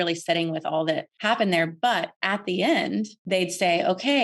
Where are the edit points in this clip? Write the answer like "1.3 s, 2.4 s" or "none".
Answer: 1.1 s, 2.1 s, 3.2 s

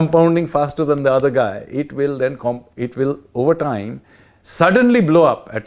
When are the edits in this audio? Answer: none

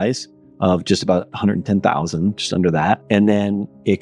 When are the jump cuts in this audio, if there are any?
3.0 s

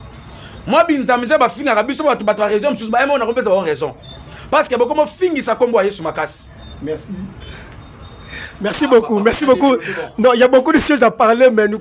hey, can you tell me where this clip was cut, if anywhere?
none

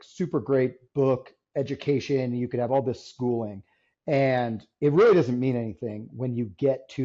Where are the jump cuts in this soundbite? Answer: none

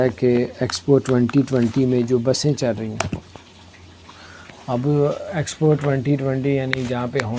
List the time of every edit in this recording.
none

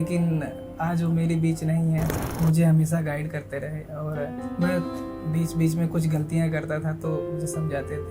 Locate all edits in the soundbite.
2.1 s

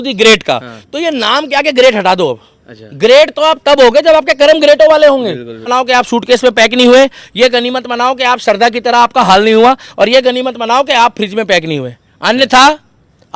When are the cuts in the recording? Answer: 5.6 s

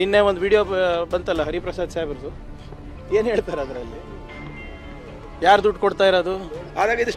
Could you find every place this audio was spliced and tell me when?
none

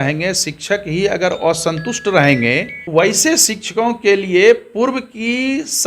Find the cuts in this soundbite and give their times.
2.8 s

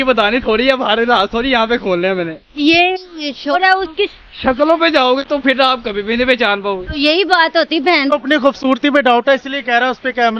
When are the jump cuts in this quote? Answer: 3.5 s, 8.1 s

